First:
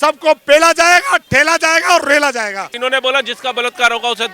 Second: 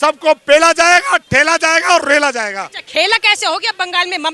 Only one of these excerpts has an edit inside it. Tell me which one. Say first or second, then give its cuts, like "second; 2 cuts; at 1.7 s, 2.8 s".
first; 1 cut; at 2.7 s